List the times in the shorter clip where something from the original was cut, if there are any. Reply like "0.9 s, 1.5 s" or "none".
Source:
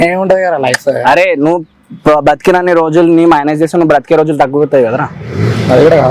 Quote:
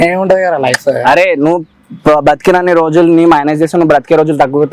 none

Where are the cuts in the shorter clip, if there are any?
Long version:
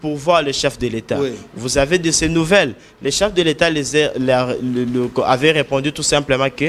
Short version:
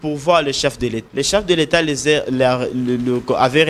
1.0 s

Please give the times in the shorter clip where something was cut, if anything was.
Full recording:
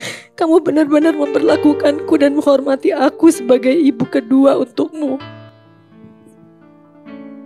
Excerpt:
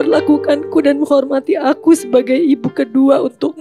none

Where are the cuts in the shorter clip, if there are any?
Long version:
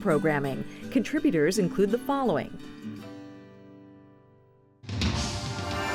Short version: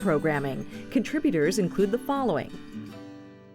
2.5 s

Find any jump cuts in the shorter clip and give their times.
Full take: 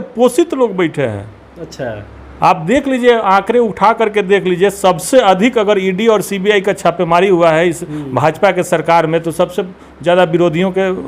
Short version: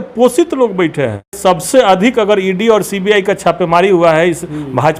1.4 s

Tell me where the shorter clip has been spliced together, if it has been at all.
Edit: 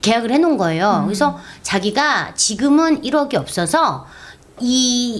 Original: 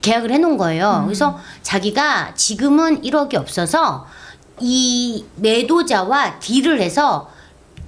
none

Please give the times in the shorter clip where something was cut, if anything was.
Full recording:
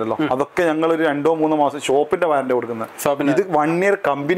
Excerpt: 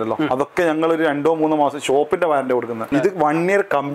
2.9 s

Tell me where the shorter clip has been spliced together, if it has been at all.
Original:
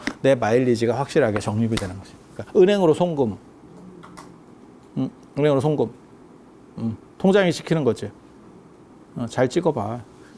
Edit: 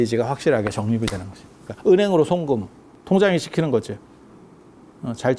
2.9 s

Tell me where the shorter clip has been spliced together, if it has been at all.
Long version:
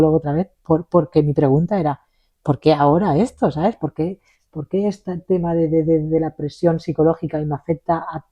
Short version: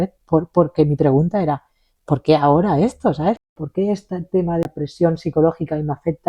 3.5 s, 4.6 s

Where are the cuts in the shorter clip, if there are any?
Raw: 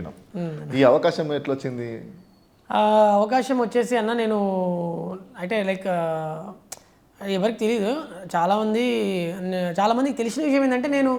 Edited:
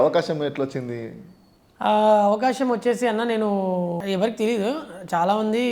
4.0 s

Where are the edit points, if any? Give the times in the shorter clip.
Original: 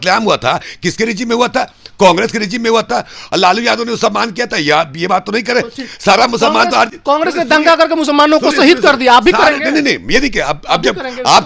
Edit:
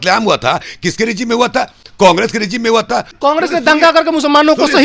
3.1 s

